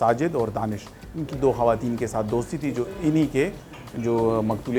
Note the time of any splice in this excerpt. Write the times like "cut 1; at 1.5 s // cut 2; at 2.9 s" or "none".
none